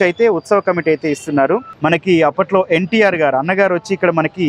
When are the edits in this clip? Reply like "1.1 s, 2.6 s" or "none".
1.7 s